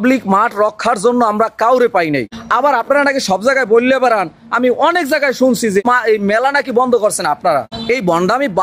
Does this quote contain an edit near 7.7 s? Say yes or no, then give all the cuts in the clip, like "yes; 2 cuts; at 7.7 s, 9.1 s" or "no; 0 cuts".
yes; 3 cuts; at 2.4 s, 5.8 s, 7.7 s